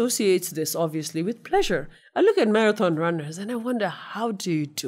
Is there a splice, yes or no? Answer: yes